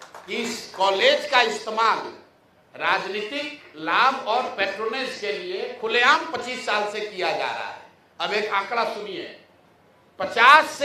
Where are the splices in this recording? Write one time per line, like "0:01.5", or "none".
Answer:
none